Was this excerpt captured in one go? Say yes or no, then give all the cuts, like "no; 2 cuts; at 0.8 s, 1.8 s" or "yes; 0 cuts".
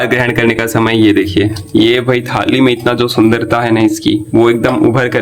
yes; 0 cuts